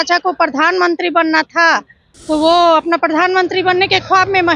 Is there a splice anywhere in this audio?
no; 0 cuts

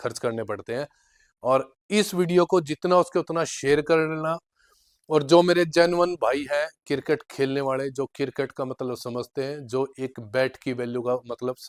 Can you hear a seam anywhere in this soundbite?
no; 0 cuts

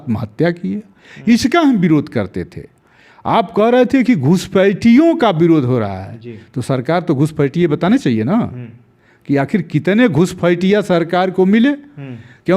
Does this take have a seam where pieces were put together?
no; 0 cuts

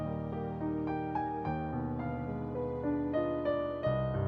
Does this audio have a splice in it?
no; 0 cuts

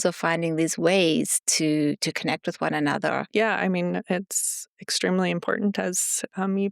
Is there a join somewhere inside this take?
yes; 1 cut; at 3.3 s

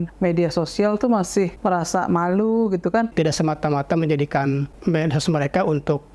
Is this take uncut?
no; 3 cuts; at 1.5 s, 3.1 s, 4.7 s

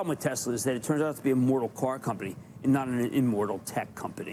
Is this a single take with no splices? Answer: yes; 0 cuts

